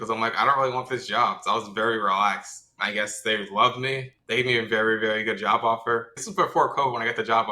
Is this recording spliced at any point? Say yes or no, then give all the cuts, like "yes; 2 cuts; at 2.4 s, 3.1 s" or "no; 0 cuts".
yes; 3 cuts; at 2.7 s, 4.1 s, 6.2 s